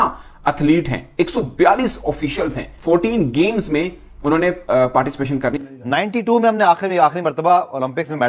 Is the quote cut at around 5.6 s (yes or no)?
yes